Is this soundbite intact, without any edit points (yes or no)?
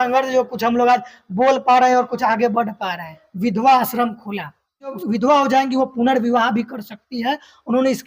no